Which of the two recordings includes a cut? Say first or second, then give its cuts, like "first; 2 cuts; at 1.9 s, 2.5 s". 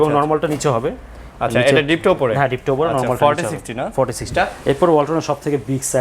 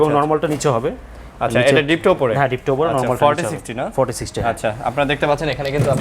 first; 1 cut; at 4.3 s